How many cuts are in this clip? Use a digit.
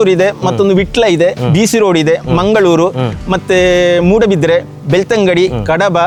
0